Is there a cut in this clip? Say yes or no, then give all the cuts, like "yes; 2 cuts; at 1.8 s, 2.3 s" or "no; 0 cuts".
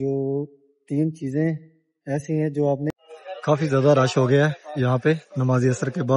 yes; 1 cut; at 2.9 s